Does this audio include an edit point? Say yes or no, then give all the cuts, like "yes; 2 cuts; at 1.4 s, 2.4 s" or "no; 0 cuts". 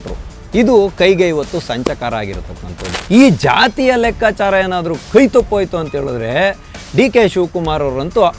yes; 1 cut; at 2.9 s